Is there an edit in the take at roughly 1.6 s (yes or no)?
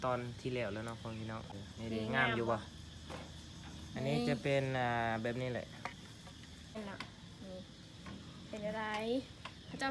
yes